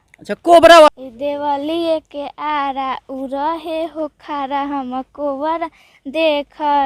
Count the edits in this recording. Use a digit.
1